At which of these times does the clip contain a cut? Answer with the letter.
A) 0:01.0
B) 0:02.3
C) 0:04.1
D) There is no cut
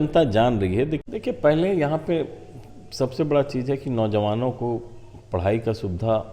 A